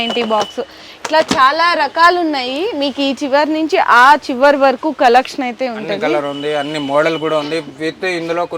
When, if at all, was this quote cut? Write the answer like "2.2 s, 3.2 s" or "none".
none